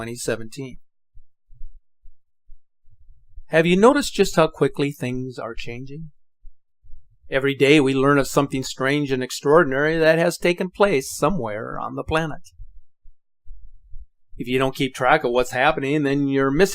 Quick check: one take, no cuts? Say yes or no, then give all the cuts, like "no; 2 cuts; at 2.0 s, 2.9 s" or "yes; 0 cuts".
no; 1 cut; at 15.6 s